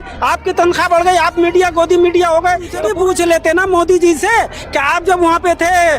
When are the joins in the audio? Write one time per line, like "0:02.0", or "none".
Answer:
0:02.8